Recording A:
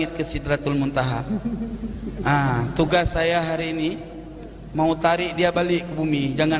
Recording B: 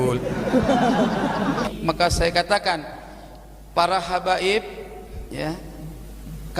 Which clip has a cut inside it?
B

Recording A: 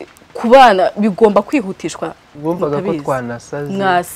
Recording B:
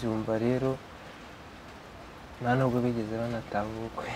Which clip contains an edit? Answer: A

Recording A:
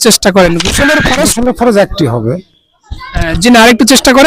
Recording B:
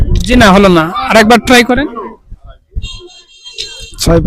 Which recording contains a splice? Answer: A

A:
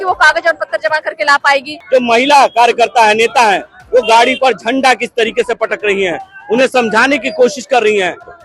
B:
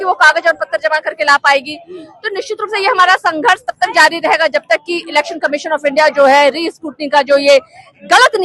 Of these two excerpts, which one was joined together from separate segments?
A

